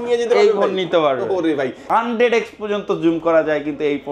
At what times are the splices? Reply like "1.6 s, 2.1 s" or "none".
1.8 s